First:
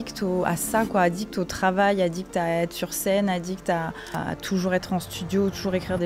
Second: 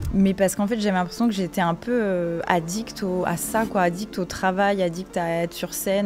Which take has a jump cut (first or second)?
first